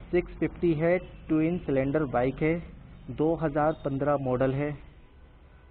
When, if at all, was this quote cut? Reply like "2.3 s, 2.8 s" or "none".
none

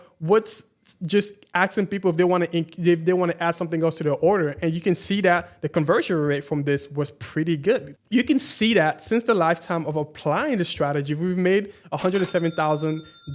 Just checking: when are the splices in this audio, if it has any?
7.9 s

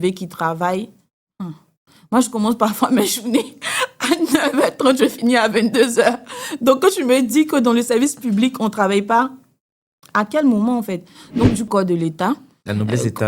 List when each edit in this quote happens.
11.7 s

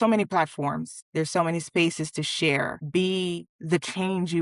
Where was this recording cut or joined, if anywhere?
0.9 s, 2.8 s, 3.5 s

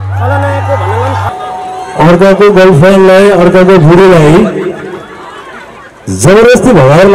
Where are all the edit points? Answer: 1.3 s

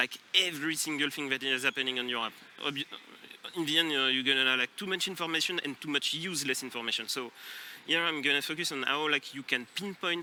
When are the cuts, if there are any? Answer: none

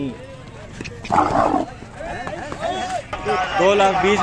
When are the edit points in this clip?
3.2 s

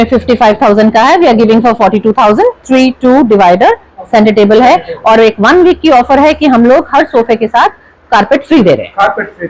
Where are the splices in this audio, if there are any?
none

